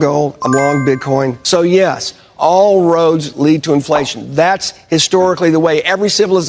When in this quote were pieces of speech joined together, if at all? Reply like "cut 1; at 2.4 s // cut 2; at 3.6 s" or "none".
cut 1; at 1.4 s